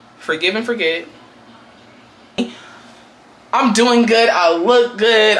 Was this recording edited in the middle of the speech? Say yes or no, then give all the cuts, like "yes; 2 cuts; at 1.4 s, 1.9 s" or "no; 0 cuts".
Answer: yes; 1 cut; at 2.4 s